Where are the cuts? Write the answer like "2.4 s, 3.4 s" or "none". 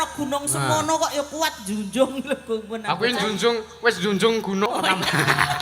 4.7 s